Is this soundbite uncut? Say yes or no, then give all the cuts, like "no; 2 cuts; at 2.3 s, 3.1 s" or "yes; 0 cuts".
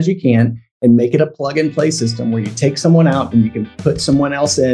yes; 0 cuts